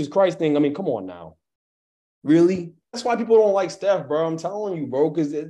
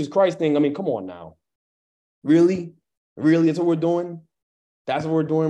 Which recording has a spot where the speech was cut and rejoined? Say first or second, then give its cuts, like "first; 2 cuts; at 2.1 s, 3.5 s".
first; 1 cut; at 2.9 s